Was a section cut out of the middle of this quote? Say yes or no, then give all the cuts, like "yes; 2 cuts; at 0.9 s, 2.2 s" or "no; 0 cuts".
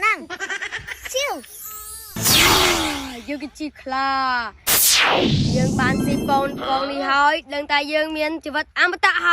yes; 1 cut; at 2.2 s